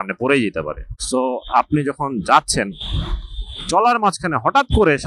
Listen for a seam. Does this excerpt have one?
no; 0 cuts

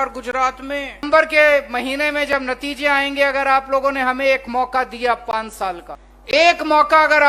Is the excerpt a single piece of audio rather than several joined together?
no; 2 cuts; at 1.0 s, 6.1 s

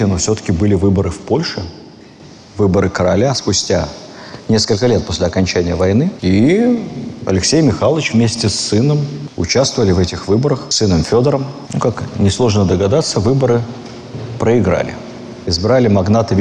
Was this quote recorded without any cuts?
yes; 0 cuts

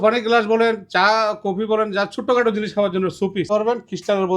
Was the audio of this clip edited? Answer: yes; 1 cut; at 3.5 s

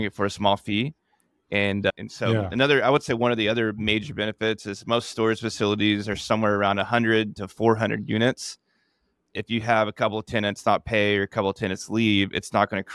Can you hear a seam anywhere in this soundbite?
no; 0 cuts

